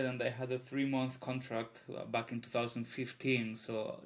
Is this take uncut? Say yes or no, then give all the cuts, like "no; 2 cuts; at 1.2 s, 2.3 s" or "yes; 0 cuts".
yes; 0 cuts